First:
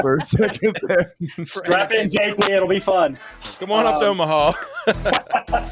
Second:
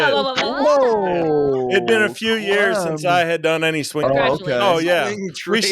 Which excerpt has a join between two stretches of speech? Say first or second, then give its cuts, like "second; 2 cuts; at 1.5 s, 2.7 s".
second; 1 cut; at 4.0 s